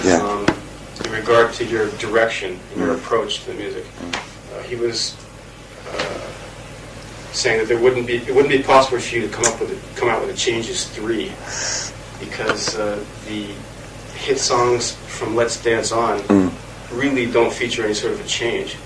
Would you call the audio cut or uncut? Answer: uncut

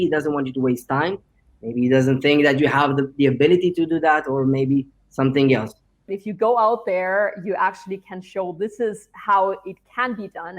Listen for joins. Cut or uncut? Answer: cut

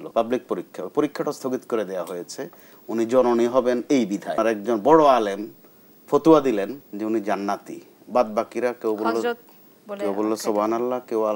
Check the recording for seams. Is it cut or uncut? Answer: cut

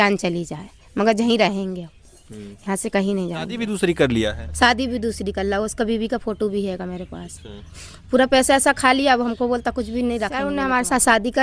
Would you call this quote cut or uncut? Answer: cut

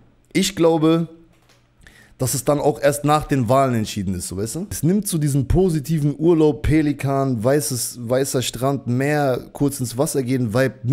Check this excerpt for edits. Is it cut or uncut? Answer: cut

